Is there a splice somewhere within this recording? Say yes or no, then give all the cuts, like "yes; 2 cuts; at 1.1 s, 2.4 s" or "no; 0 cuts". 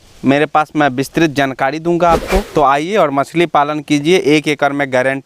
yes; 1 cut; at 2.5 s